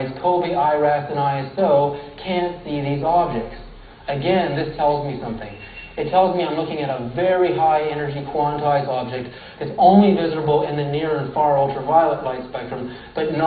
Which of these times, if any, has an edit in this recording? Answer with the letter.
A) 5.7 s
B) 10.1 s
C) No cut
B